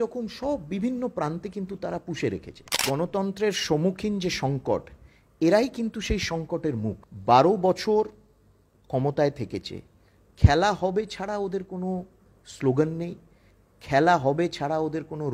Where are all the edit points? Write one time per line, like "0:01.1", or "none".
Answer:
0:02.8
0:07.1

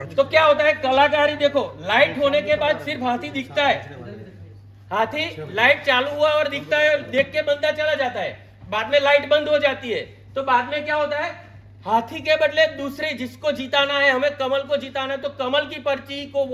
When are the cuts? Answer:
none

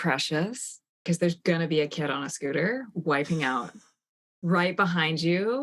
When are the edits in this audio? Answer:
0:01.0

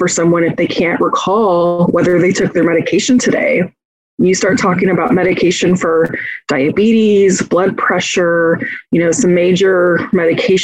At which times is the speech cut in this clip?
none

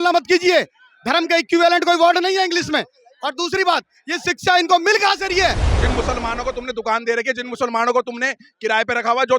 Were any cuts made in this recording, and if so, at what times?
0:05.7

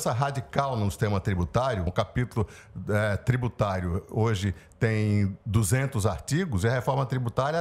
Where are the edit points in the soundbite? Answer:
0:01.9

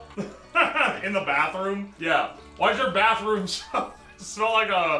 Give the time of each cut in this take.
0:01.9

